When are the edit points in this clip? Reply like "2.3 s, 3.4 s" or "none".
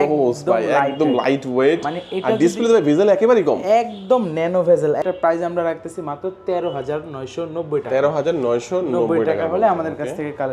5.0 s